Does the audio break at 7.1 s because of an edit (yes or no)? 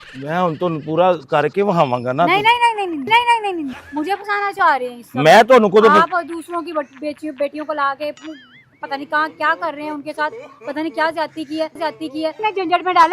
no